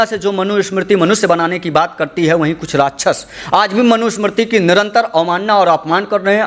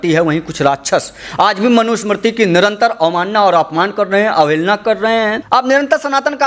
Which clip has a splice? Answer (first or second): second